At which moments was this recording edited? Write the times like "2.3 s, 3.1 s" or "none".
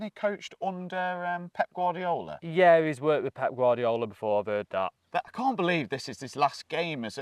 5.0 s